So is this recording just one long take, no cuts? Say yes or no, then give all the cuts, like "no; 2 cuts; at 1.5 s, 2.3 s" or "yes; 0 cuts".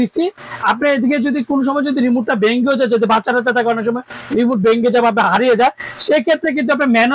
yes; 0 cuts